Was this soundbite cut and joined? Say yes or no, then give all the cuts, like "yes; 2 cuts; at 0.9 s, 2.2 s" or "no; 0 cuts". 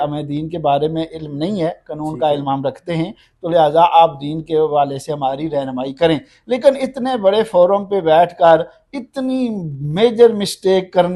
no; 0 cuts